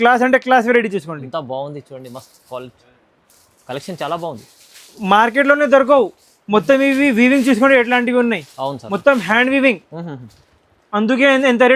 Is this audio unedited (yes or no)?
yes